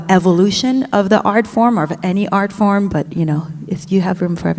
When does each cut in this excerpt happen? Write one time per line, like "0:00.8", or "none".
0:02.9